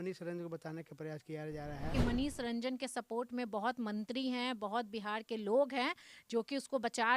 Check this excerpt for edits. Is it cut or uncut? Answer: cut